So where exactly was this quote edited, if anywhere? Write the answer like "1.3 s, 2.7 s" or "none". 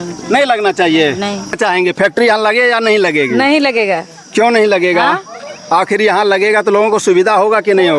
1.6 s